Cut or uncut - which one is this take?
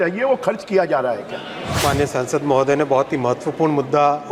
cut